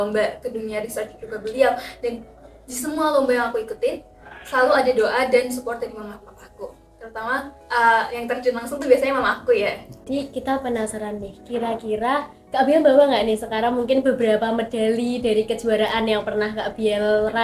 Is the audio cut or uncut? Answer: cut